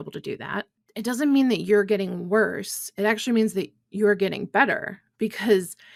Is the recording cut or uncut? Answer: uncut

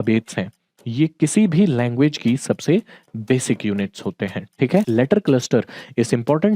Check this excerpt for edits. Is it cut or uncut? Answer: cut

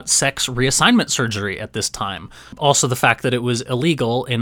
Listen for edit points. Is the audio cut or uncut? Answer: uncut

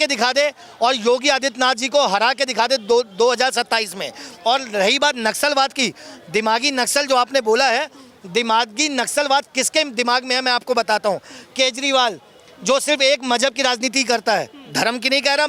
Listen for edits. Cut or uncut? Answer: uncut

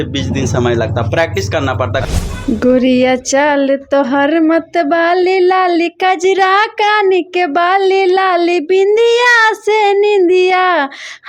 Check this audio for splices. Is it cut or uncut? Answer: cut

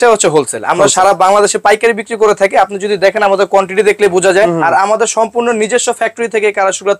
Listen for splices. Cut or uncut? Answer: cut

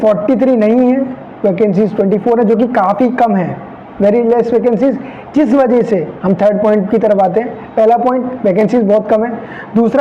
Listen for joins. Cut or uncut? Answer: uncut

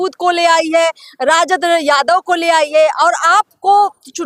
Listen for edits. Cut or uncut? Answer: uncut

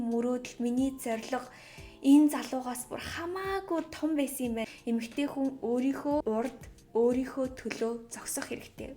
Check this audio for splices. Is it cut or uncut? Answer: cut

